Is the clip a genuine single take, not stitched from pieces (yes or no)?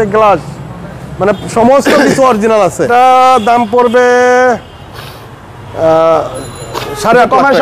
yes